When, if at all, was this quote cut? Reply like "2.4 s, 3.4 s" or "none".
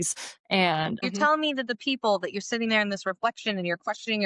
1.0 s